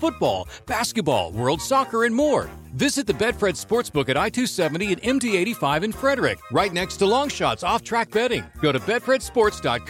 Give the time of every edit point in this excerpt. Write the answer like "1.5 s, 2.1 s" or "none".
none